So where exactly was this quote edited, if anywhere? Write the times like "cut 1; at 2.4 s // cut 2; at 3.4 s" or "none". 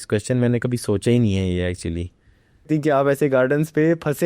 cut 1; at 2.6 s